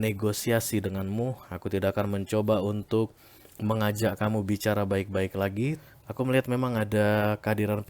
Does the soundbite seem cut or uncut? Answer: cut